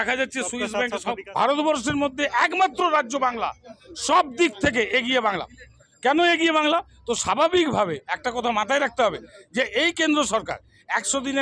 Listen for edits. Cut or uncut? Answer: cut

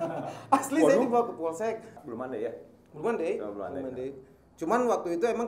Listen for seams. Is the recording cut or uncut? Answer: cut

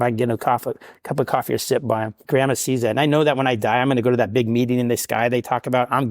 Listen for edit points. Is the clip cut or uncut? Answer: cut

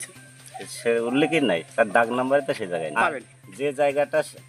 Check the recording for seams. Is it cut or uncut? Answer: cut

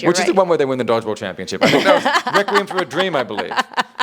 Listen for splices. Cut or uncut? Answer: uncut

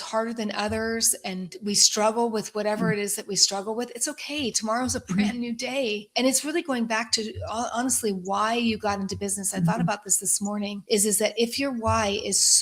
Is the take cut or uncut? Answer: cut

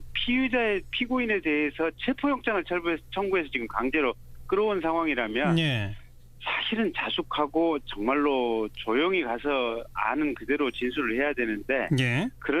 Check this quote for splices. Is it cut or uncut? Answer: uncut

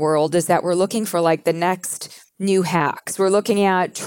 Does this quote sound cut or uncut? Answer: cut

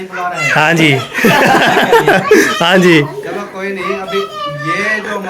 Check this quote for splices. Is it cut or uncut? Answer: uncut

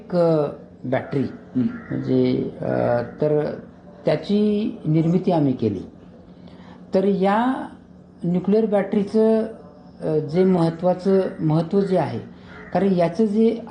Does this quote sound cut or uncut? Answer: uncut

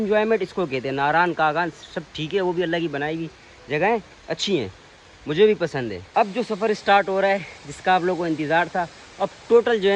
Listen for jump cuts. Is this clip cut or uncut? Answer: cut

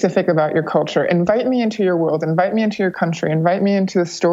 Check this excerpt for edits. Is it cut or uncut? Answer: uncut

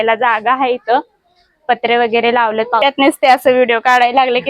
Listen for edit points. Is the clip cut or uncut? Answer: cut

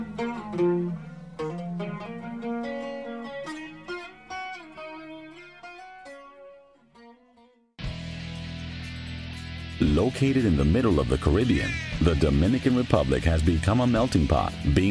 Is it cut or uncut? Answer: cut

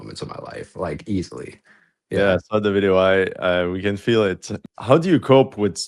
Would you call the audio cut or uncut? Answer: uncut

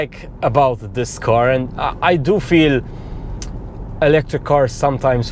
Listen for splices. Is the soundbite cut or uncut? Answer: uncut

